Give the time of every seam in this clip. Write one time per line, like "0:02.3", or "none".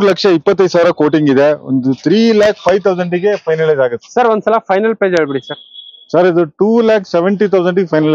0:04.0